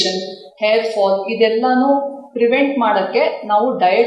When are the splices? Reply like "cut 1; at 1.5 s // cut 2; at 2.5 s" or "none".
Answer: none